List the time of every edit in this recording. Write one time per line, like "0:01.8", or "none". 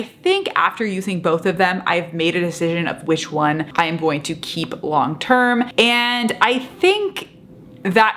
0:03.7
0:05.7